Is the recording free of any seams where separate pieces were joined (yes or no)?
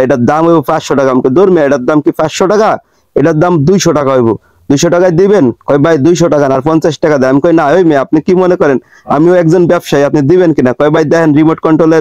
yes